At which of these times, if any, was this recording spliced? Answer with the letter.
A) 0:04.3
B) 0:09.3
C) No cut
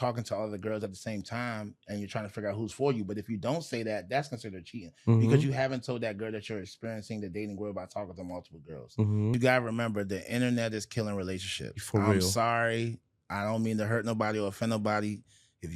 B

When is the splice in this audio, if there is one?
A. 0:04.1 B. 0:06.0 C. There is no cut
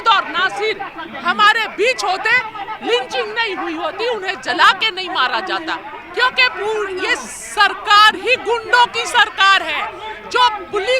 B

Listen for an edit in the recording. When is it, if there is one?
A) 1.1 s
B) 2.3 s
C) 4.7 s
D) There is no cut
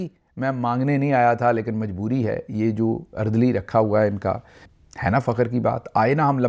C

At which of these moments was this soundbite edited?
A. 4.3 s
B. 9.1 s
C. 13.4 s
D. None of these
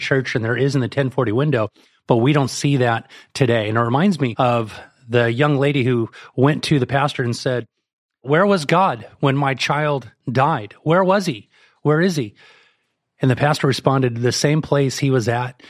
A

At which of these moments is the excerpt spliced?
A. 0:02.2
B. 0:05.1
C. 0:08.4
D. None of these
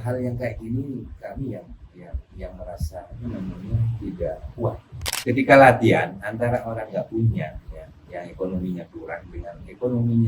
B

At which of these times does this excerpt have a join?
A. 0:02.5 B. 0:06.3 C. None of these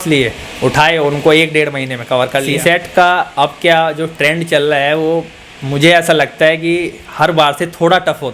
A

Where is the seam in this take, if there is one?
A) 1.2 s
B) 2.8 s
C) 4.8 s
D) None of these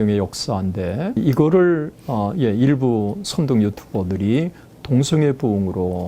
A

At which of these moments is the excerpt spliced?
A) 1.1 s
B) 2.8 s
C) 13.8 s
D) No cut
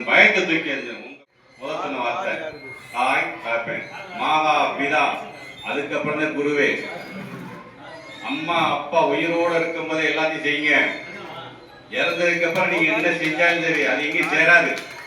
A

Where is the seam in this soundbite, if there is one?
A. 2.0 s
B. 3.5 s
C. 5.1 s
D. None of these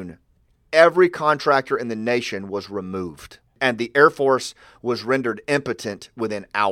B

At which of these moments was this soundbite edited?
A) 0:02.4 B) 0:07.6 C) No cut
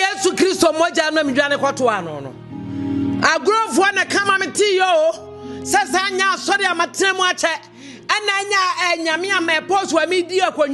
C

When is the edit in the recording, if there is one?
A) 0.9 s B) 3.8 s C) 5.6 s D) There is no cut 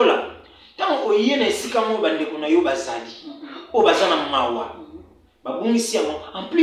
D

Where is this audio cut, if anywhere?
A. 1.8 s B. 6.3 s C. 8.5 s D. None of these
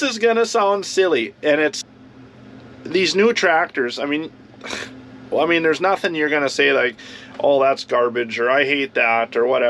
A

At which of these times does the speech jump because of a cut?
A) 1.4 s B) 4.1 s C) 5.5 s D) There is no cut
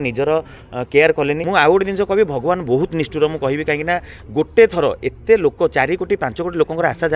A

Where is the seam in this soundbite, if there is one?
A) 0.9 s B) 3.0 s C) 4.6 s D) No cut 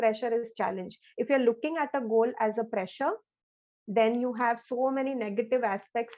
D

